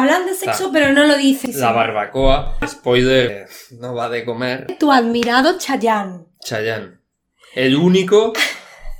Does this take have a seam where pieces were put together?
yes; 4 cuts; at 1.4 s, 2.7 s, 3.3 s, 4.7 s

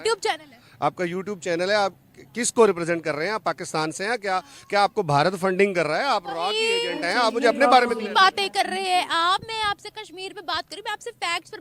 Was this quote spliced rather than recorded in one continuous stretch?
no; 0 cuts

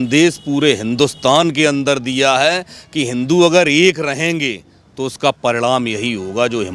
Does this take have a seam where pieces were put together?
no; 0 cuts

